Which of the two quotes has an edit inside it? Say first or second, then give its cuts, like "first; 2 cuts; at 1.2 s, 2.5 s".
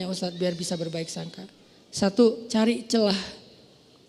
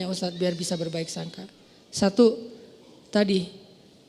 first; 1 cut; at 2.4 s